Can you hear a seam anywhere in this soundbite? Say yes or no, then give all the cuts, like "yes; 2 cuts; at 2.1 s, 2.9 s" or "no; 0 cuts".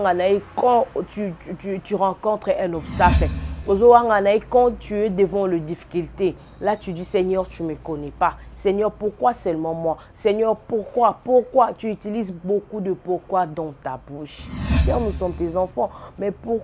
yes; 1 cut; at 14.7 s